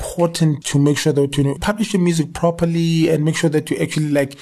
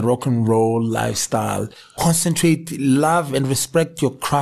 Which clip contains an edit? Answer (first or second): second